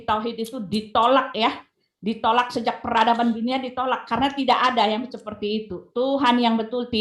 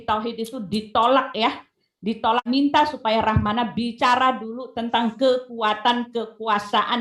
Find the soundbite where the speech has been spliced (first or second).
second